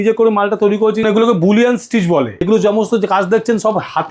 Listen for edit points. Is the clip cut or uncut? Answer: cut